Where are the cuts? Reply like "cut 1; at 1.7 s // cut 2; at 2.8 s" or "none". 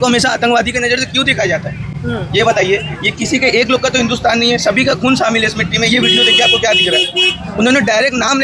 none